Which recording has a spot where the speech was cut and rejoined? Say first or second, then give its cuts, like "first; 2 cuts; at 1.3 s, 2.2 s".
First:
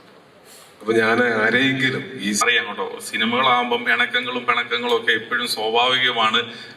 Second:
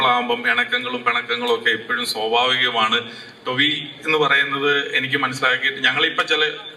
first; 1 cut; at 2.4 s